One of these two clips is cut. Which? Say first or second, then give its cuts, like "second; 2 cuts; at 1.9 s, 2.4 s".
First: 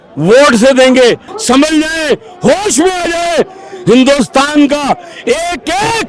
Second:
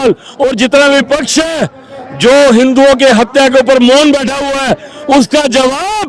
first; 1 cut; at 1.3 s